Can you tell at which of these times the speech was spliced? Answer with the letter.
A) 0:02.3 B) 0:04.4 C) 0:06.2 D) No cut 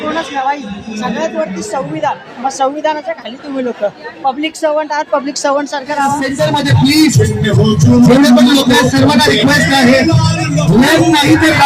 C